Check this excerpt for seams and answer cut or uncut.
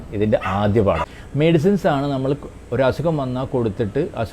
cut